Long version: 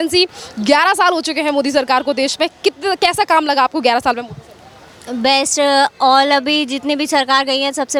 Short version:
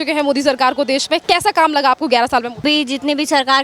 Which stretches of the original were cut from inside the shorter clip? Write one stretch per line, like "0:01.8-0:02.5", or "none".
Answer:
0:02.5-0:03.0
0:04.3-0:06.4